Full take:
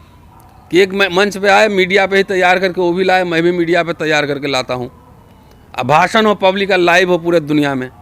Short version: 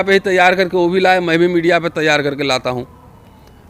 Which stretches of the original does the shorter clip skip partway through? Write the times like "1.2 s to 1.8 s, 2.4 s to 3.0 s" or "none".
none

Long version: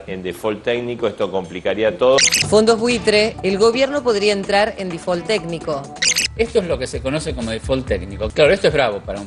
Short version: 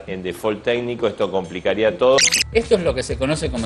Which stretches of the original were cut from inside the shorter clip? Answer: 2.4 s to 6.2 s

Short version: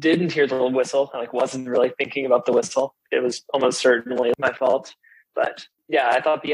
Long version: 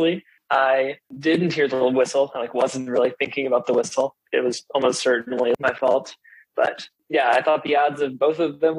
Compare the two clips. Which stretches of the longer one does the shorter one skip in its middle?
none

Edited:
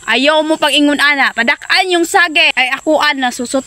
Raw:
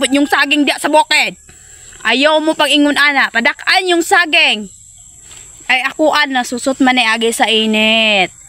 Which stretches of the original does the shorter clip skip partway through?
4.5 s to 5.6 s

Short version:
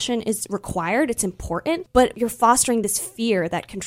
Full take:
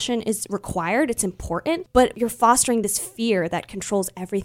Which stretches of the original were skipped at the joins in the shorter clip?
none

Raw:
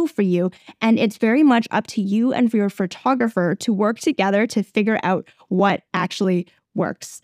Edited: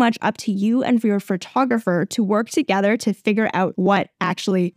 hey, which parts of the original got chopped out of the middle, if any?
5.2 s to 5.5 s

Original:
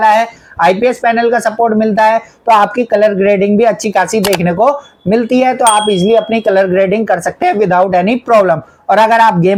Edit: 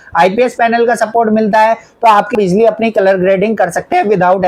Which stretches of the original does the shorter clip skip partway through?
2.8 s to 5.8 s

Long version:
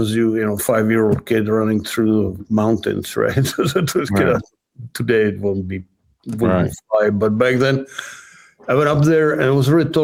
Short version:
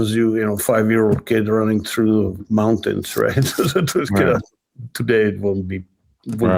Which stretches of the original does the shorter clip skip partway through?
none

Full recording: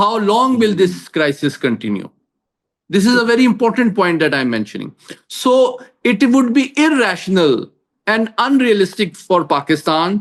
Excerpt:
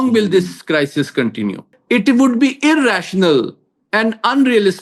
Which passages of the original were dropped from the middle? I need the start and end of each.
2.2 s to 5.9 s

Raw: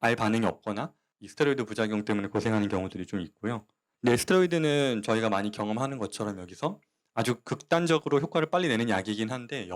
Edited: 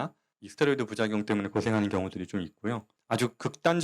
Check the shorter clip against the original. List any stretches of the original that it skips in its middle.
3.7 s to 7.0 s

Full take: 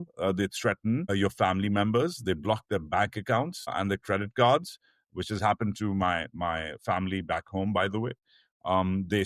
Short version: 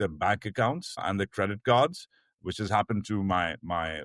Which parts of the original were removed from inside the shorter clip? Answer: none

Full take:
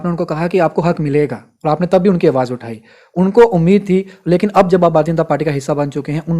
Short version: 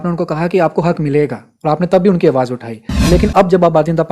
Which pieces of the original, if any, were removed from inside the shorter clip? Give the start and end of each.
2.9 s to 4.1 s

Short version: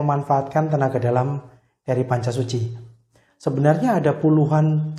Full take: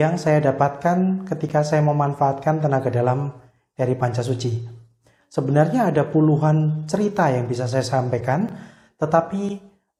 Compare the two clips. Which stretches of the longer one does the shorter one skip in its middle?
none

